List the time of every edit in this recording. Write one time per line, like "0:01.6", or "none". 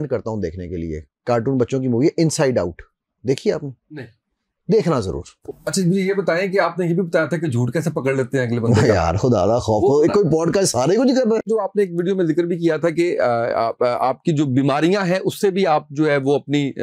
0:05.5
0:11.5